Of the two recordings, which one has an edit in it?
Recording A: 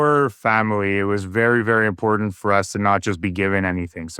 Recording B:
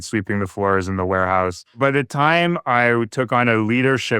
B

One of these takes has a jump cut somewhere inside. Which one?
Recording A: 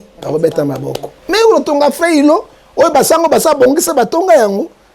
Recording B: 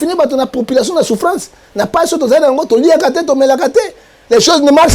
A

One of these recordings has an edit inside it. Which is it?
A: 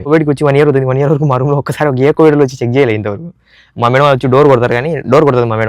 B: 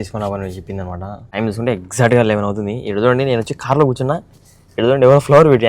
B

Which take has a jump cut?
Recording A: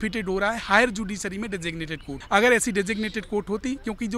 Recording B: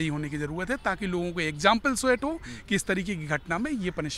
A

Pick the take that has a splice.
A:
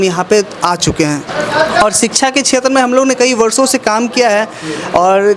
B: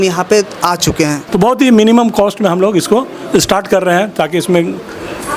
B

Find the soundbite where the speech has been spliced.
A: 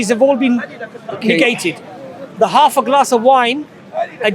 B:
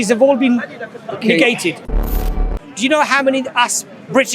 B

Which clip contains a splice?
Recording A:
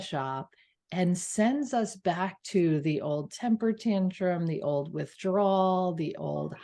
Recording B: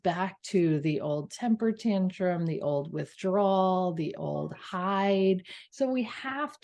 B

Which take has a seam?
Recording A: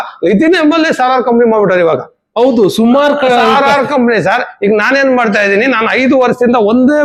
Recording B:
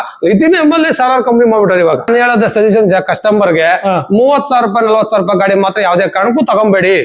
B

